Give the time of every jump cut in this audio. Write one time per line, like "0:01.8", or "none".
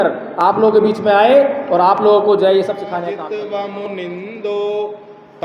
0:02.9